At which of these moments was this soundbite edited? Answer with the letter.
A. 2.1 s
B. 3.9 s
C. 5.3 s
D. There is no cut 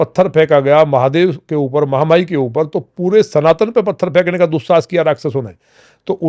D